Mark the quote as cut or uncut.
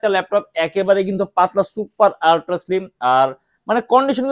uncut